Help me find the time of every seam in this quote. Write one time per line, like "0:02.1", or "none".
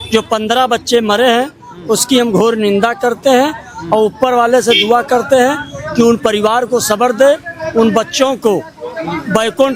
none